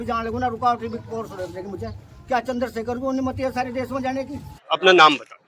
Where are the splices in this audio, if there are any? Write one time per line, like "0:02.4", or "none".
0:04.5